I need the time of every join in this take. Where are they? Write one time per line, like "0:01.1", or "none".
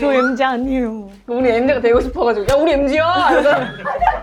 none